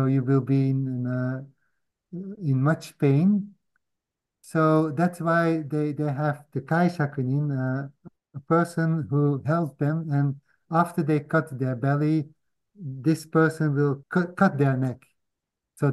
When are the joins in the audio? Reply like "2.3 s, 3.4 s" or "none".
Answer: 14.0 s